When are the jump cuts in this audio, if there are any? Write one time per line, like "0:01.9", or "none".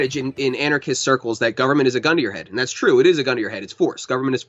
none